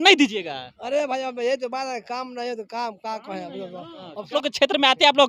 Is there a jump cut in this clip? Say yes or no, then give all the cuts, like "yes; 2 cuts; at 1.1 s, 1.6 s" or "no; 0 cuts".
yes; 1 cut; at 4.3 s